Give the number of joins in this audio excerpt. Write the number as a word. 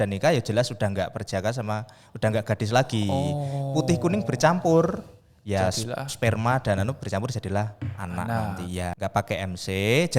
one